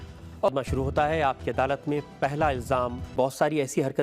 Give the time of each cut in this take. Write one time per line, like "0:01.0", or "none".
0:03.1